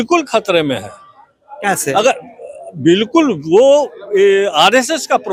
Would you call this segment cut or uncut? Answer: uncut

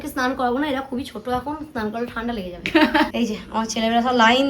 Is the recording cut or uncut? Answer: cut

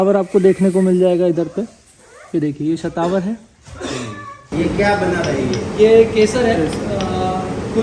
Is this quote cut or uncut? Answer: cut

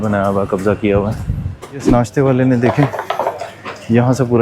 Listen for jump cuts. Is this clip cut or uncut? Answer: cut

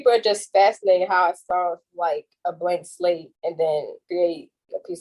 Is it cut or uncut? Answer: cut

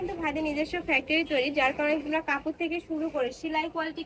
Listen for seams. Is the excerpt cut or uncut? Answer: uncut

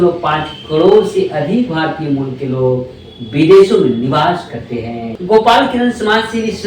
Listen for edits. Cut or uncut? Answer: cut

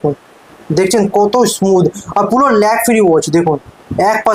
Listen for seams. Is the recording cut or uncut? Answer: uncut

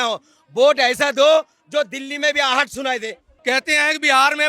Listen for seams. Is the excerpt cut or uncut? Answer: cut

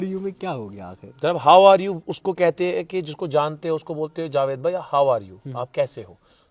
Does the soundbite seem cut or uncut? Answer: uncut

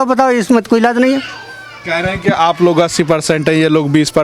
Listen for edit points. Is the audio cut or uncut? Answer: uncut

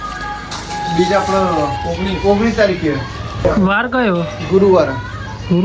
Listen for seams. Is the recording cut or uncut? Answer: cut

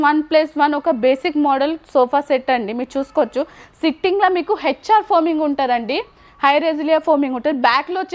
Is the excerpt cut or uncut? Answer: uncut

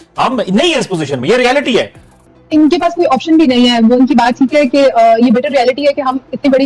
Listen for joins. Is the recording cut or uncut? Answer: cut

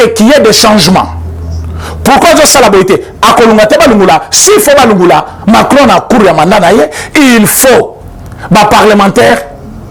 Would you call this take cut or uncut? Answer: uncut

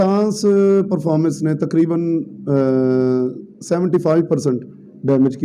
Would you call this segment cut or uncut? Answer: uncut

